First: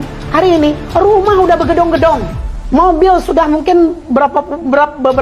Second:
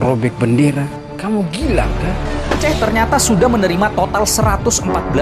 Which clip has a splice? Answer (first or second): second